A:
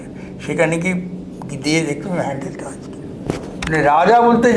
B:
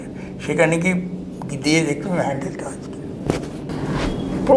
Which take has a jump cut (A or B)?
A